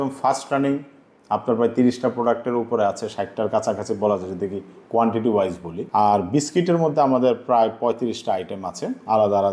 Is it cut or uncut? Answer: cut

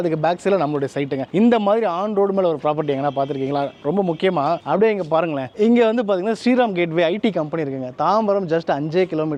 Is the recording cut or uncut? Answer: uncut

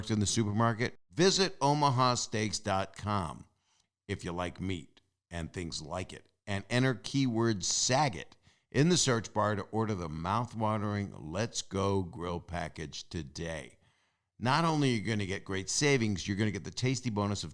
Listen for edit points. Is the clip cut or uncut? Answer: cut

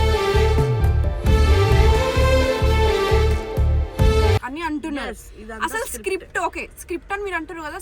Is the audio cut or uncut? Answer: uncut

